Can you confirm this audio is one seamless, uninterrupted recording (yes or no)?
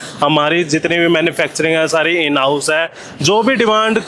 no